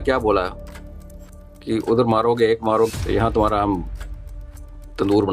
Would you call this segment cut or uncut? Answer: cut